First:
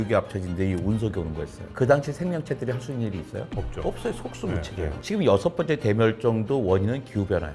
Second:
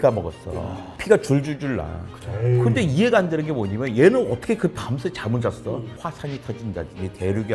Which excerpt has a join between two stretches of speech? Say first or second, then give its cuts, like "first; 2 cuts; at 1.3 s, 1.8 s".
second; 1 cut; at 6.0 s